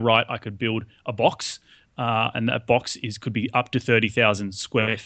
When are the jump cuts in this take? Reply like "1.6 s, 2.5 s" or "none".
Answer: none